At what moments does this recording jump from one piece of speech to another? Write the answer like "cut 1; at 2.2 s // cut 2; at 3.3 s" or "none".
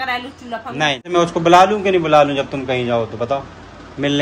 cut 1; at 1.1 s

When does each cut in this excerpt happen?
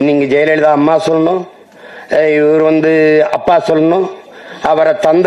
none

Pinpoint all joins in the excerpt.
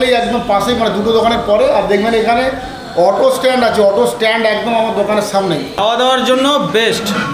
cut 1; at 5.8 s

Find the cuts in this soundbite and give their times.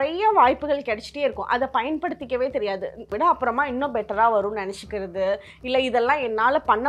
cut 1; at 3.0 s

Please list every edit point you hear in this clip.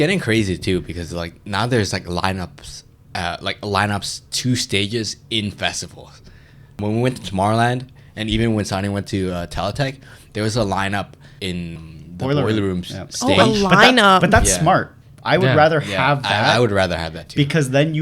cut 1; at 6.7 s

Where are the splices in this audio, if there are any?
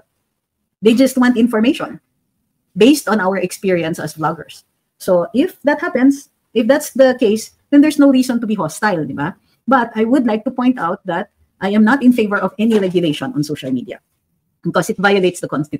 none

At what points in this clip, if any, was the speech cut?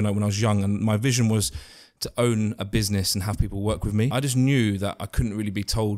cut 1; at 4.1 s

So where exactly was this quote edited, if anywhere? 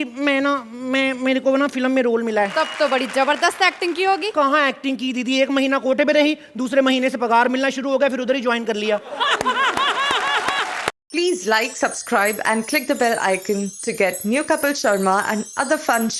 cut 1; at 2.5 s // cut 2; at 4.3 s // cut 3; at 11.0 s

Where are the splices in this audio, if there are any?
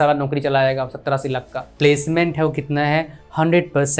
cut 1; at 1.7 s

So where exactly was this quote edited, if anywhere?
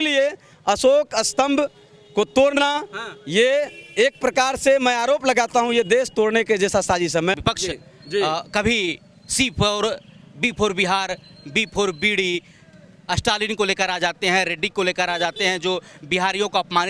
none

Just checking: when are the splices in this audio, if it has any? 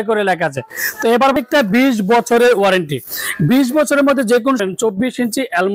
cut 1; at 1.3 s // cut 2; at 4.6 s

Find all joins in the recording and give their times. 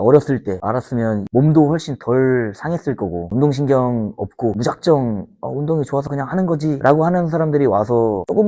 cut 1; at 1.2 s // cut 2; at 3.2 s

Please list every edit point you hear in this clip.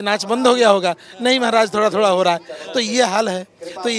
none

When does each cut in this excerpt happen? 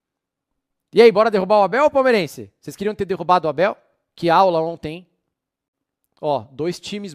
none

